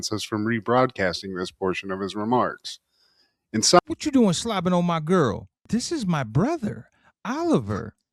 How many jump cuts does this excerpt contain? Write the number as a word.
one